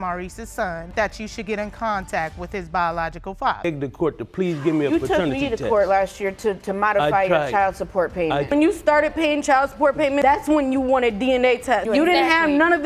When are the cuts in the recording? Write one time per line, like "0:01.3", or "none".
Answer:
0:00.9
0:03.6
0:08.5